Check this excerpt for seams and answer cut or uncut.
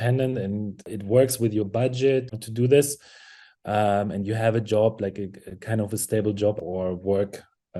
cut